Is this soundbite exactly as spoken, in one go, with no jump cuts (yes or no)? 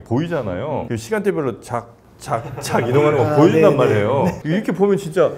yes